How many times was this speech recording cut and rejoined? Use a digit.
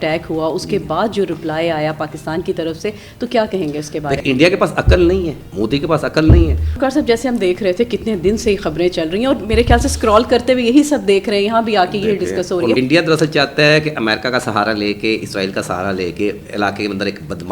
4